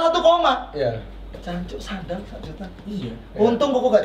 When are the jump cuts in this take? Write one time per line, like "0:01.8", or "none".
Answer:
0:01.3

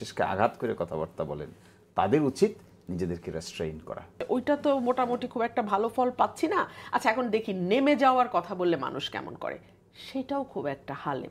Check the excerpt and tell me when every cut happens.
0:04.2

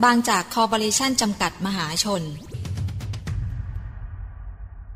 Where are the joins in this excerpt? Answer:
0:02.6

